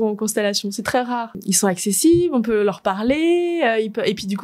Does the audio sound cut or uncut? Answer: cut